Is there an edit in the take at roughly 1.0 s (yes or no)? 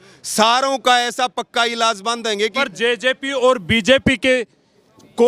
no